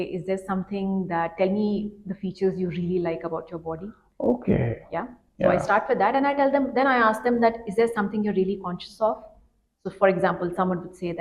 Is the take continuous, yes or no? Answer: yes